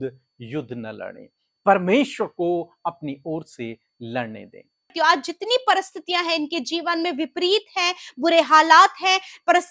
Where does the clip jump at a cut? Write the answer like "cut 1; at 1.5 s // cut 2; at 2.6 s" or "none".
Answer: cut 1; at 4.9 s